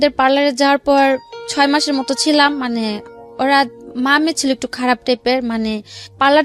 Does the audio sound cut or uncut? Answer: uncut